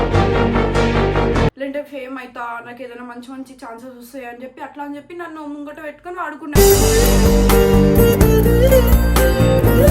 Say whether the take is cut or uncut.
cut